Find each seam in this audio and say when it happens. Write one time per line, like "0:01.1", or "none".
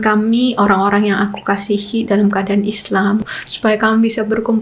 0:03.3